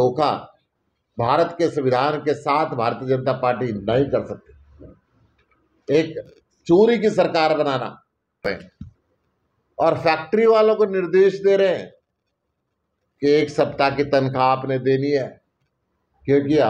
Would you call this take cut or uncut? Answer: cut